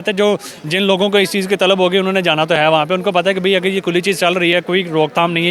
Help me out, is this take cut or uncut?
uncut